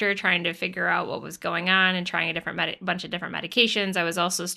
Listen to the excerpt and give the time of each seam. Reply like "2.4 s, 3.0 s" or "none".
none